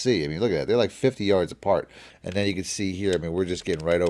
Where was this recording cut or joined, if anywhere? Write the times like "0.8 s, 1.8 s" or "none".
2.0 s